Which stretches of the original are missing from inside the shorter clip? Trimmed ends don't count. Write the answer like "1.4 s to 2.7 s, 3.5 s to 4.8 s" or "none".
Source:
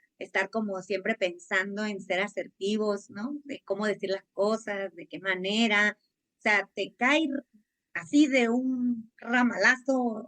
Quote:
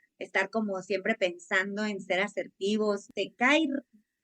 3.1 s to 6.7 s